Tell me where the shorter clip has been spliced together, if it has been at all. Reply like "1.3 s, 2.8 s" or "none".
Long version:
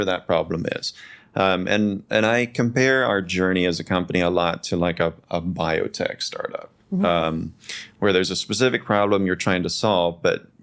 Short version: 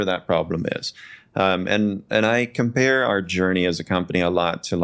none